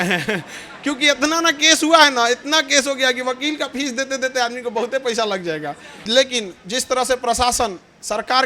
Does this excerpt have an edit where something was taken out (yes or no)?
yes